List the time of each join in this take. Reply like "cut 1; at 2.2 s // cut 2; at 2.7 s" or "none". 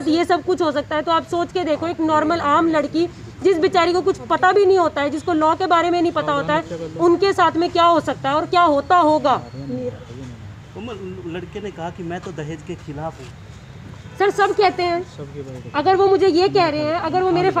none